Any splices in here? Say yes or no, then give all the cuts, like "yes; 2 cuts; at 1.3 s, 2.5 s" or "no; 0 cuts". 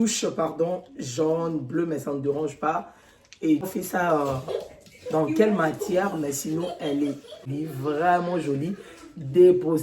yes; 2 cuts; at 3.7 s, 7.5 s